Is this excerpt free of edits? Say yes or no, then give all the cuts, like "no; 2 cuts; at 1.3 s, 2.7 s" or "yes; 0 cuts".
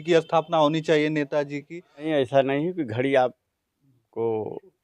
no; 1 cut; at 2.1 s